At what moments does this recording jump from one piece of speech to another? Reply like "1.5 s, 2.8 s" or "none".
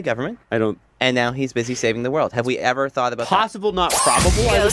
none